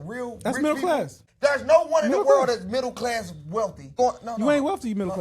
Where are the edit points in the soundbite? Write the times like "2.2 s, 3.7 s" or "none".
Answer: 1.2 s, 4.0 s

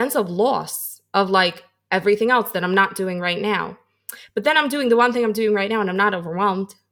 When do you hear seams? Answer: none

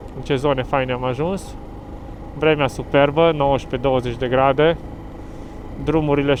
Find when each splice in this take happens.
none

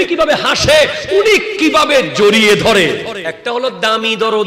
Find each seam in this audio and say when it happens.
3.2 s

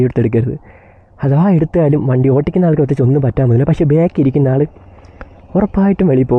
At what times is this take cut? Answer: none

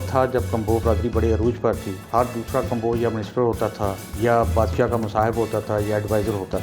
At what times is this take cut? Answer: 1.9 s, 4.0 s

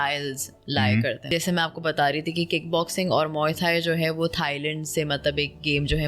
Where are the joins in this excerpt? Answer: 1.3 s

